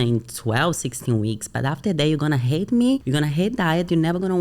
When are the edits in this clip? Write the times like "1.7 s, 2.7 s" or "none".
3.1 s